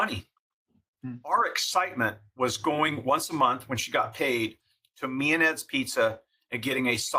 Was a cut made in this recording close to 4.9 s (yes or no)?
no